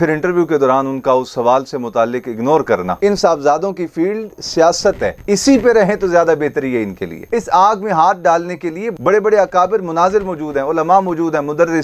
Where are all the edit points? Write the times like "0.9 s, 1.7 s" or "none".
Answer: 2.9 s, 7.2 s